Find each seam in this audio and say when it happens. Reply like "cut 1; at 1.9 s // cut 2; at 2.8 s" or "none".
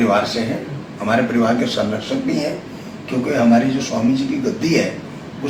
none